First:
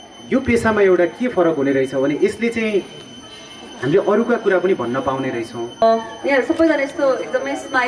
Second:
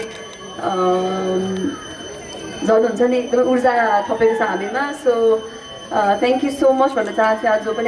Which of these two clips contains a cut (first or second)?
first